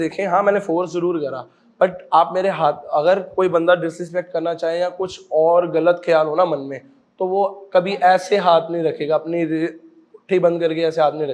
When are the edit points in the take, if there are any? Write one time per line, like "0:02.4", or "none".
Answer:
none